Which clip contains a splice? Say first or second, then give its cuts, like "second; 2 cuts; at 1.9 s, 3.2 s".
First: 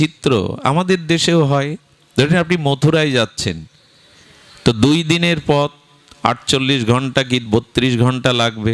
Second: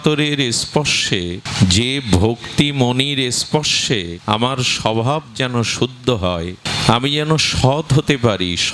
second; 3 cuts; at 1.4 s, 4.1 s, 6.7 s